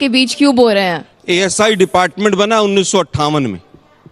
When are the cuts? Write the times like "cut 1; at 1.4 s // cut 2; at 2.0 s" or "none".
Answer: cut 1; at 1.1 s